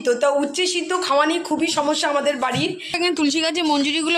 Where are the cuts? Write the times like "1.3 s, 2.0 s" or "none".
2.9 s

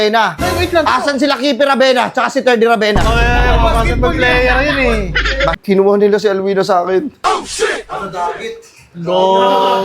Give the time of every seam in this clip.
5.6 s

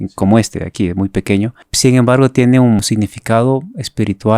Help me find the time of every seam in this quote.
1.6 s, 2.8 s

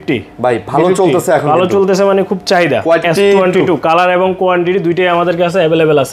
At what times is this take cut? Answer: 3.0 s

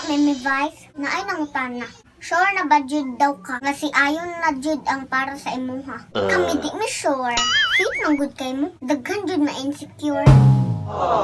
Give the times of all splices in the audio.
none

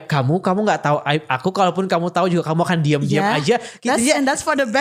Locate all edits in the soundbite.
none

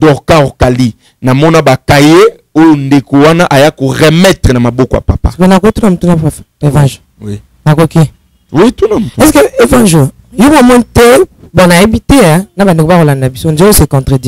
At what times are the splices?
none

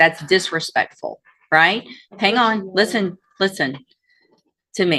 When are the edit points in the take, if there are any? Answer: none

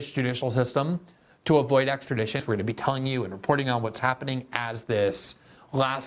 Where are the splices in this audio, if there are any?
2.4 s

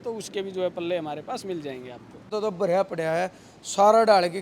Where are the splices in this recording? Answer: 2.3 s

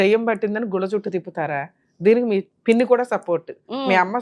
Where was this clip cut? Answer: 2.5 s

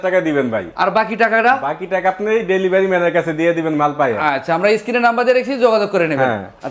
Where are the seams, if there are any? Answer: none

